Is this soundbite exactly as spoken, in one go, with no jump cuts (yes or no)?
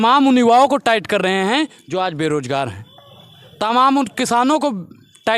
yes